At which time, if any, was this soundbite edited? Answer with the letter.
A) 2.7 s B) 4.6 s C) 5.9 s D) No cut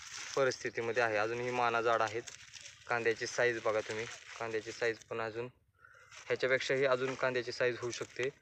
D